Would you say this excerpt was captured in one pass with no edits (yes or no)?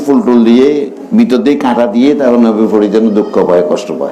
yes